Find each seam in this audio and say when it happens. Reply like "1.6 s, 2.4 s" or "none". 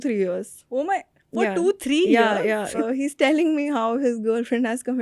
2.7 s